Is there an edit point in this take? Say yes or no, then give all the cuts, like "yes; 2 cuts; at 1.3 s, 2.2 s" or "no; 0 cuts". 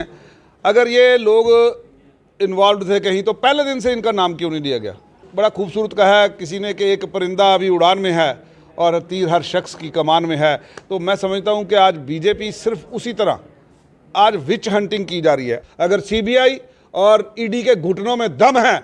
yes; 2 cuts; at 5.2 s, 15.6 s